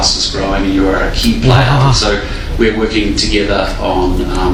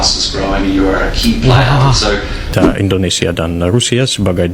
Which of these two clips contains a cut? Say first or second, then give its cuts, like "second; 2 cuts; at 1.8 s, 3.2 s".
second; 1 cut; at 2.4 s